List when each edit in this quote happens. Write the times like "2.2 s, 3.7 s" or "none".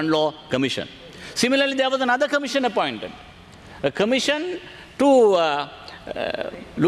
none